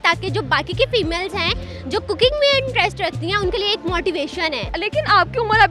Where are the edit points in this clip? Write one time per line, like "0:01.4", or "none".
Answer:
0:04.7